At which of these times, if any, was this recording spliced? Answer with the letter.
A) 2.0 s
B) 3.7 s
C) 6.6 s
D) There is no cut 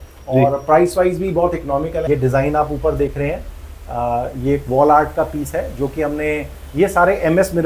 A